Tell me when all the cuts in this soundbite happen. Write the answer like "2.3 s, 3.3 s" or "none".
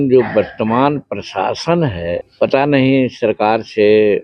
2.3 s